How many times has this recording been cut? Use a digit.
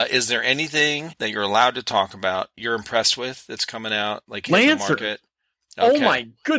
2